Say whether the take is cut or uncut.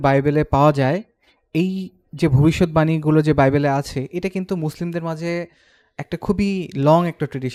uncut